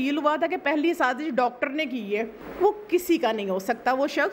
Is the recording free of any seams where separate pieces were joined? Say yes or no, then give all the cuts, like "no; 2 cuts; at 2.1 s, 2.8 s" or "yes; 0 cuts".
no; 1 cut; at 2.4 s